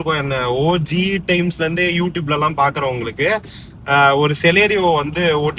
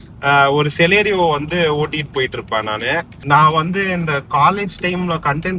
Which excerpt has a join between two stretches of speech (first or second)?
second